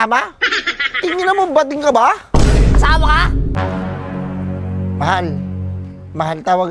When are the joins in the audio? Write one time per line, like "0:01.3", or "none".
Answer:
0:03.5